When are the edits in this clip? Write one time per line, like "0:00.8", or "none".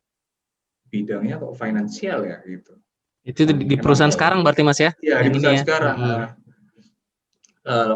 none